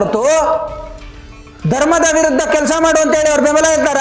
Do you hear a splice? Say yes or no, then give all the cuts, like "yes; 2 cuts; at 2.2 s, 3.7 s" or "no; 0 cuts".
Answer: no; 0 cuts